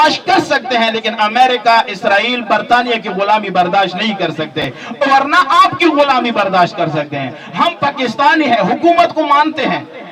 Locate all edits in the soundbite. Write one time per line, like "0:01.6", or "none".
none